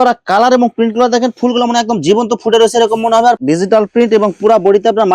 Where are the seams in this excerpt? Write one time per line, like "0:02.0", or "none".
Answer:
0:03.4